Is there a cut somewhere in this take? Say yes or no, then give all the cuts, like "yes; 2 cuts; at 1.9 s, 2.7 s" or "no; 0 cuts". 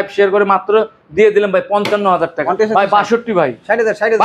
yes; 1 cut; at 2.4 s